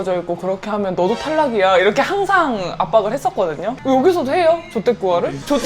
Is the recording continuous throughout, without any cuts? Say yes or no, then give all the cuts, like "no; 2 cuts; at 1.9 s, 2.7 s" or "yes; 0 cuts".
no; 1 cut; at 3.8 s